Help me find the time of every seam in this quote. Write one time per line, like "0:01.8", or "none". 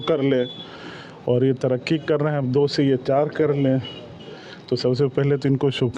none